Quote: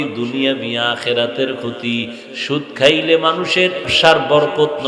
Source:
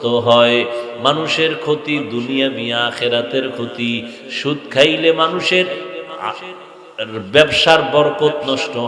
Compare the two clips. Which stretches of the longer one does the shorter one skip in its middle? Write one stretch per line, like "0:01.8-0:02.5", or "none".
0:05.9-0:07.6